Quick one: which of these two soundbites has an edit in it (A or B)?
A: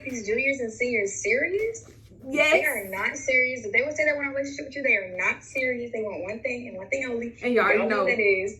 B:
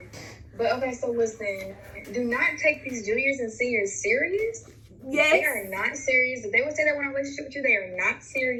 A